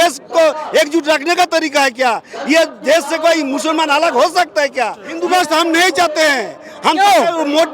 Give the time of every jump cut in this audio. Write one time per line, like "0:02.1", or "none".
0:05.1